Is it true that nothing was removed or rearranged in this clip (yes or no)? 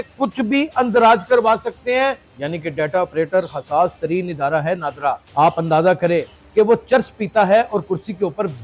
no